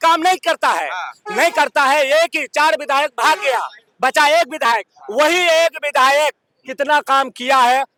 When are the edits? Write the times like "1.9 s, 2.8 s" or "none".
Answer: none